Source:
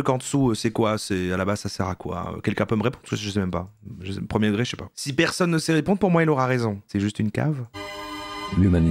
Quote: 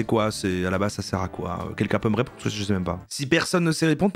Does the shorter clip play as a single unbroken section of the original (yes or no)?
no